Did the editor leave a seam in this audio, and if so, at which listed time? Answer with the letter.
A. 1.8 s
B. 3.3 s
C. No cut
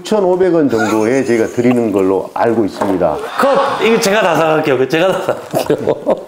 B